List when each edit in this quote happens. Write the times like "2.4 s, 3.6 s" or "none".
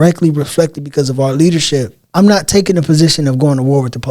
2.0 s